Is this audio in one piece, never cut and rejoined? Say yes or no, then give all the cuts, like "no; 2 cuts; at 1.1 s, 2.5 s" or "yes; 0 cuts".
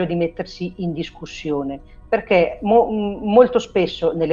yes; 0 cuts